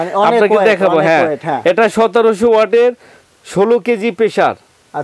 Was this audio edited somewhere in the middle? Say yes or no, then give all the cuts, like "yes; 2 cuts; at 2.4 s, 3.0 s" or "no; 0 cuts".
no; 0 cuts